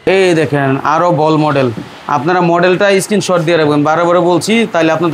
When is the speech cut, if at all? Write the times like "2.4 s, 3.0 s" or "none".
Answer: none